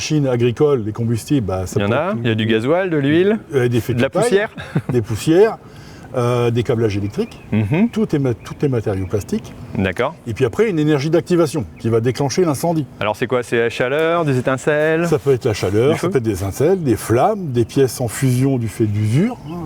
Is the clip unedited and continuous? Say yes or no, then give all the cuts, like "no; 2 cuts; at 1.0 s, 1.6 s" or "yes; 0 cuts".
yes; 0 cuts